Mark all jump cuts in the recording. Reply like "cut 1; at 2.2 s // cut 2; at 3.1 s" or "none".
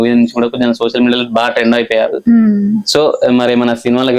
none

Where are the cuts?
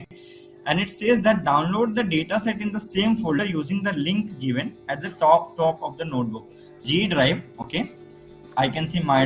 cut 1; at 6.8 s

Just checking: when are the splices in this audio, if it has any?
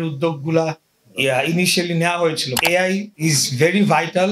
cut 1; at 2.8 s

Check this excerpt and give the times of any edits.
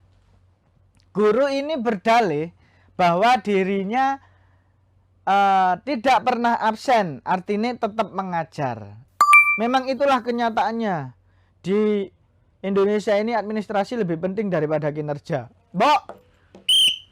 cut 1; at 9.0 s

